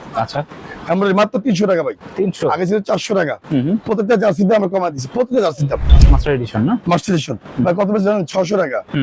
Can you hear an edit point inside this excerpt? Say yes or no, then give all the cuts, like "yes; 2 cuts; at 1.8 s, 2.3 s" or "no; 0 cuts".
yes; 1 cut; at 5.9 s